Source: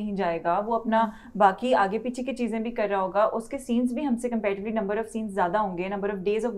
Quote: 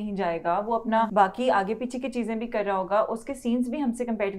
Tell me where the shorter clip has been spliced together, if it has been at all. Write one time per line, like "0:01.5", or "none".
0:01.1